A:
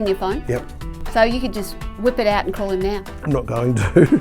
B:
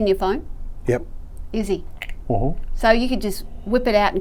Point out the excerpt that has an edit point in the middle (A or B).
A